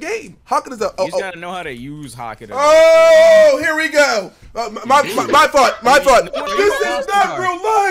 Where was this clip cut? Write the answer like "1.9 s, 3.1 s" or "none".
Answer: 6.5 s